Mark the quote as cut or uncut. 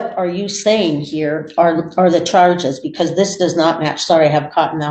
uncut